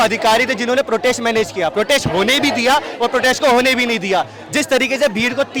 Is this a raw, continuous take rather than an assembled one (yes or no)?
yes